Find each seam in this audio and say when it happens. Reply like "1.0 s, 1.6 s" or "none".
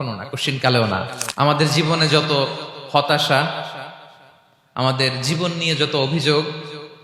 1.2 s

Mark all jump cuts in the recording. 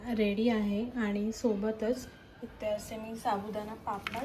none

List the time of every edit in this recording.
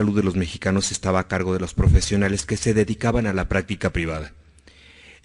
2.0 s

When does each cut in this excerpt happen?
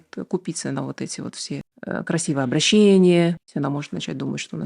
1.7 s, 3.4 s

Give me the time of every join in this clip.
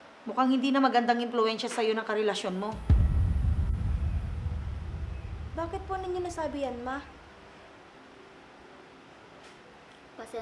7.7 s

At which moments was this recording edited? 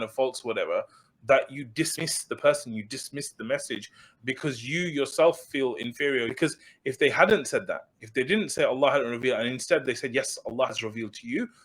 6.3 s

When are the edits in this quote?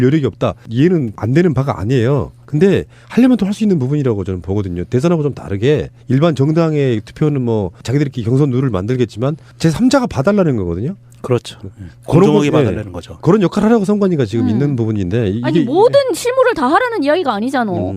8.8 s

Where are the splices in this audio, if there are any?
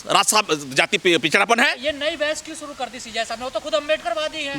none

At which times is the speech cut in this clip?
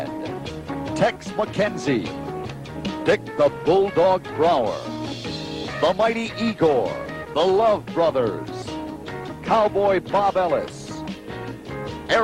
7.2 s

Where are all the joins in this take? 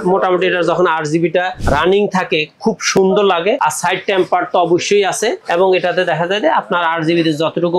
1.6 s, 3.6 s, 5.4 s

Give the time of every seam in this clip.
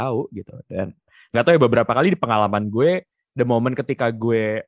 none

